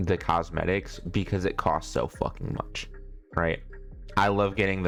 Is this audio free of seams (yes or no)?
yes